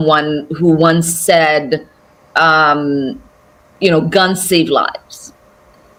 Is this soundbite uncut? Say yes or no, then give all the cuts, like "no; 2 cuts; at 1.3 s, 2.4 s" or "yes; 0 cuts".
yes; 0 cuts